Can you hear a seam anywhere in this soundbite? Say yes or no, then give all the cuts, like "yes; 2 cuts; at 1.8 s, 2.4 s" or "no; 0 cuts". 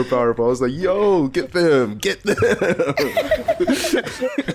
no; 0 cuts